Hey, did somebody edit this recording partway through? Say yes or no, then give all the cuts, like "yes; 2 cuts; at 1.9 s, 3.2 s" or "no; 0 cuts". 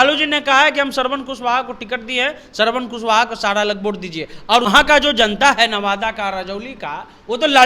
yes; 1 cut; at 4.7 s